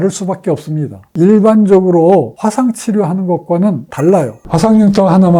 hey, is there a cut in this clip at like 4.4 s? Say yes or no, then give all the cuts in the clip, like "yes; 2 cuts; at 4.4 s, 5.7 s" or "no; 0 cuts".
yes; 1 cut; at 4.4 s